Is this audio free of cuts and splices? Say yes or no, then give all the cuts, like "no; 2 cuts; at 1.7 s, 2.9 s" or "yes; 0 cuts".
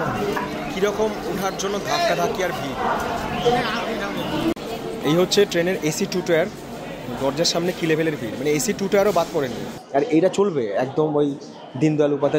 yes; 0 cuts